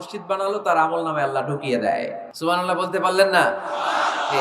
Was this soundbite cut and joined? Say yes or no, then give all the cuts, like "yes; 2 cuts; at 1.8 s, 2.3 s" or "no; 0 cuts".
yes; 1 cut; at 2.2 s